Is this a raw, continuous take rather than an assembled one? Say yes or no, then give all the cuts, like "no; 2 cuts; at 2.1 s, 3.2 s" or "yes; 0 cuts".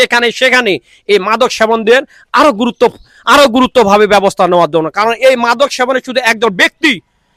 yes; 0 cuts